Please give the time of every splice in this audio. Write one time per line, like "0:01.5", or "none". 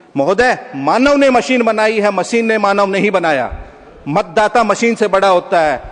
none